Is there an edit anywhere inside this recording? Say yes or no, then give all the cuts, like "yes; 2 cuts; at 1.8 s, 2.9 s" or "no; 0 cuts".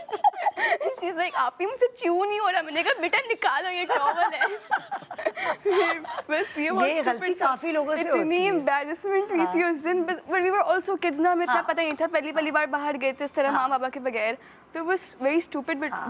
no; 0 cuts